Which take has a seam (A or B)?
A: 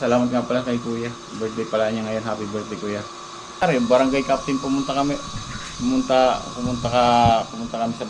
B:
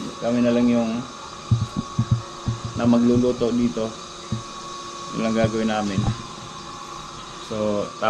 A